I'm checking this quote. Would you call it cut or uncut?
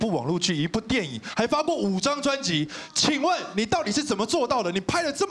uncut